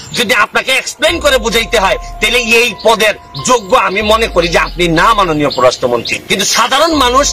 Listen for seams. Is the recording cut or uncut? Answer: cut